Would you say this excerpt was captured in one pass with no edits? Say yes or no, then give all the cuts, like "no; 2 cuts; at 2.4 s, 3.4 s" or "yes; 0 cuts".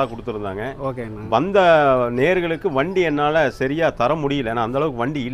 yes; 0 cuts